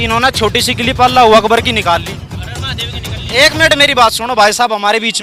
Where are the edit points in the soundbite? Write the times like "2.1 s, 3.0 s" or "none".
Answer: none